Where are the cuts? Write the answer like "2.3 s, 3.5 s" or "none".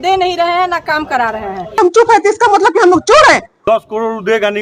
1.7 s, 3.5 s